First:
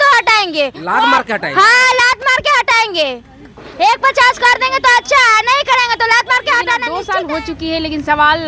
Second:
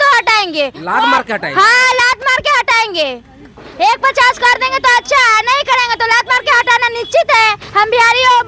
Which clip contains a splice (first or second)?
first